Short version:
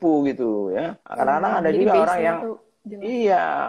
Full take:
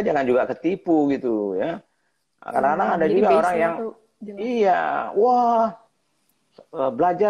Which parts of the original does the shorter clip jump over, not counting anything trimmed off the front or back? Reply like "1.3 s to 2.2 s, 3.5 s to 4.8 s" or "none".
1.8 s to 2.4 s